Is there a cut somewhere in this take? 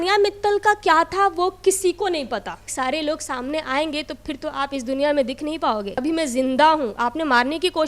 yes; 2 cuts; at 2.6 s, 6.0 s

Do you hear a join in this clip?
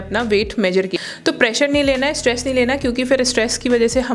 yes; 1 cut; at 0.9 s

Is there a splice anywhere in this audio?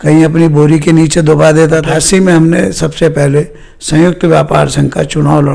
yes; 1 cut; at 1.9 s

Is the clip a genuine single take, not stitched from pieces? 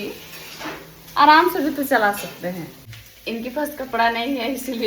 no; 1 cut; at 2.7 s

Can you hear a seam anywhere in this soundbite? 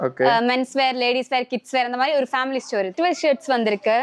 yes; 1 cut; at 2.9 s

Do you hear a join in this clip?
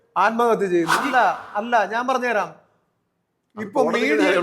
yes; 1 cut; at 1.0 s

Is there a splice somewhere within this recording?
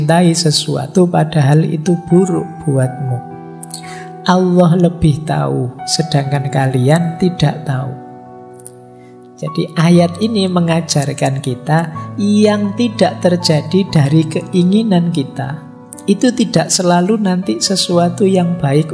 no; 0 cuts

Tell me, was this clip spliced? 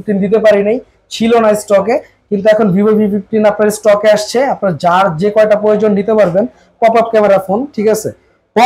no; 0 cuts

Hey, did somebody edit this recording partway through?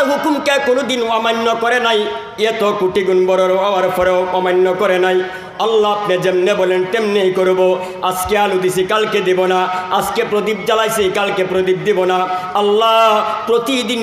no; 0 cuts

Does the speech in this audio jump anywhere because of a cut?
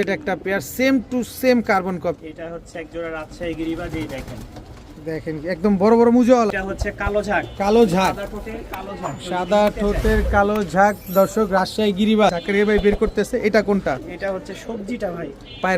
yes; 3 cuts; at 2.2 s, 6.5 s, 12.4 s

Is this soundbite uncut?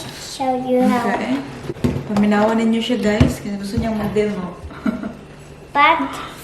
no; 1 cut; at 1.7 s

